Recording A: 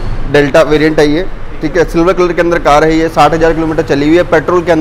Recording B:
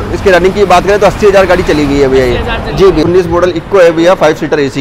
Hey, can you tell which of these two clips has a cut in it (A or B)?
B